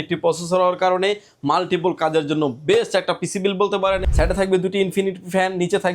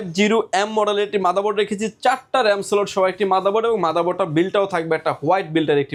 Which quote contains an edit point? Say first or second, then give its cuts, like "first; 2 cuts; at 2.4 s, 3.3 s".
first; 1 cut; at 4.0 s